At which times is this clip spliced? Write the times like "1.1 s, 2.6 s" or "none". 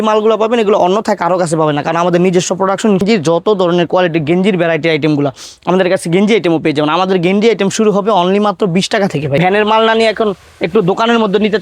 3.0 s, 9.4 s

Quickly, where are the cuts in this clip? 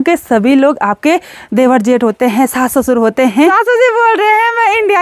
3.5 s

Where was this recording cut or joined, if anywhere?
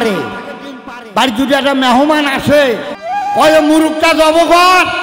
3.0 s

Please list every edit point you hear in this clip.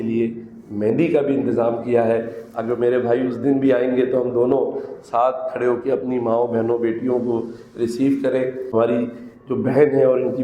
8.7 s

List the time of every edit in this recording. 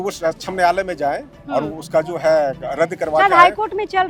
none

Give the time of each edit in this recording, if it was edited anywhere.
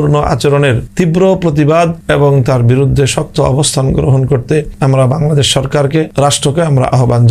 0.8 s, 2.0 s, 4.7 s, 6.1 s

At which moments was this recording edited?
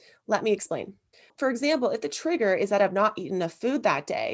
1.3 s

